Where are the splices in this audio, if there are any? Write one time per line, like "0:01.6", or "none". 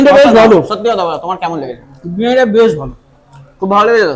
none

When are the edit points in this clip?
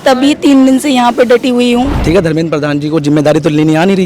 0:02.0

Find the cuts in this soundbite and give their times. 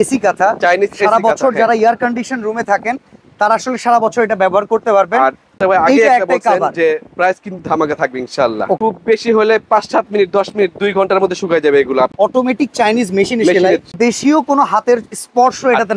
0:05.5
0:08.8
0:12.1
0:13.9

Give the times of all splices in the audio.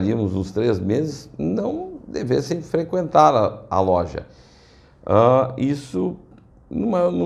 none

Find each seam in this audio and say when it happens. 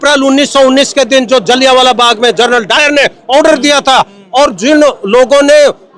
none

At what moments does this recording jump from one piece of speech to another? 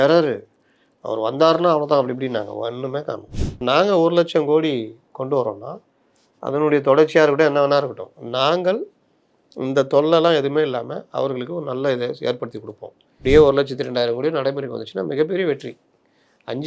0:03.6
0:13.2

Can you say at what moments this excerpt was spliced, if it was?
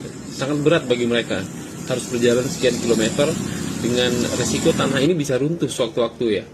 none

